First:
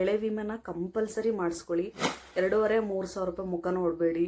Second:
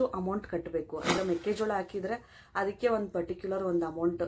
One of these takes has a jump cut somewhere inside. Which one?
second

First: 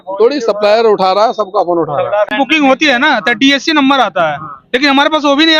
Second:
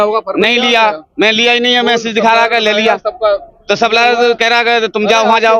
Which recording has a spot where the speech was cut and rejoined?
first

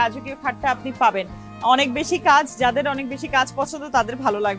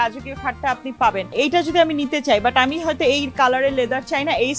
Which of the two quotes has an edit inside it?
second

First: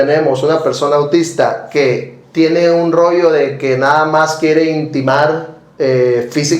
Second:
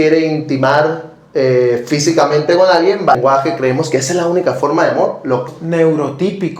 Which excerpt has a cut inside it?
second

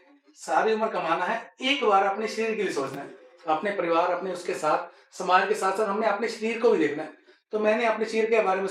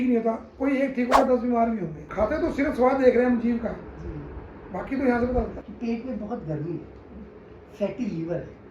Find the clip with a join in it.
second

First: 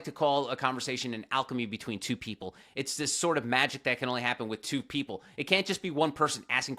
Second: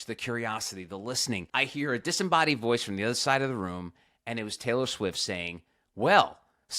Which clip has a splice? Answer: second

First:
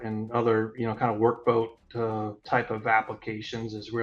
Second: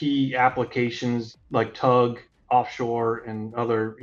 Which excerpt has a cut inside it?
second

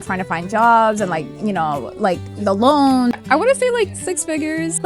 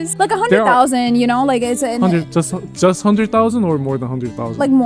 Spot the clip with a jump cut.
first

